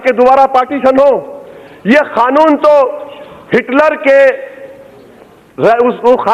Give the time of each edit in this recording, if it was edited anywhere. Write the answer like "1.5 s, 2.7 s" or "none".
none